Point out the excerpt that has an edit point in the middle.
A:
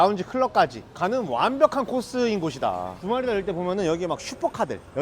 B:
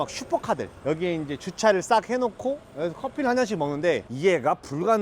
A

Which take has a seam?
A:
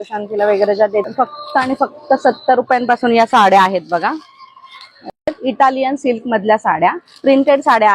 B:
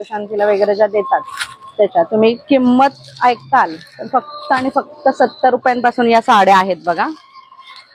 A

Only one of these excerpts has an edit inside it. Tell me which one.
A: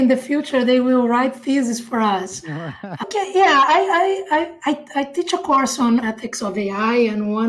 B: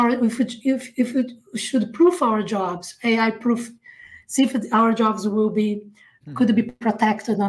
A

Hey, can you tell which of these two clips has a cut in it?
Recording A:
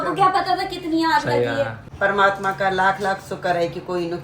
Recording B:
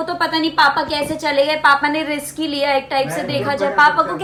A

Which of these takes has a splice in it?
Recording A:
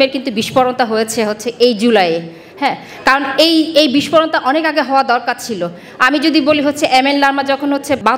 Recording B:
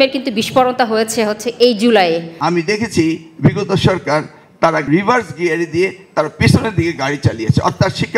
B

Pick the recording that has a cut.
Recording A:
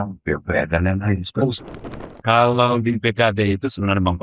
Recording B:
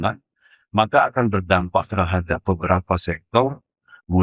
A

